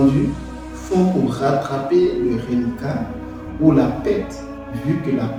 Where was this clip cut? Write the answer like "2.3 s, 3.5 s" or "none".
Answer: none